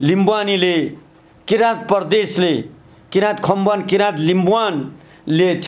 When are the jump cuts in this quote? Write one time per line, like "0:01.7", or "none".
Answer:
none